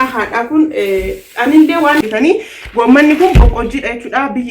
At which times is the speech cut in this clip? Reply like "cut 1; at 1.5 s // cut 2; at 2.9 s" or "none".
cut 1; at 2.0 s